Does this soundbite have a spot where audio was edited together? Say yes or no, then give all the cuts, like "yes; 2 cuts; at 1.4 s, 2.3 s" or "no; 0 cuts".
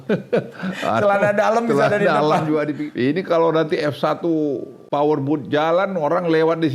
yes; 2 cuts; at 2.8 s, 4.7 s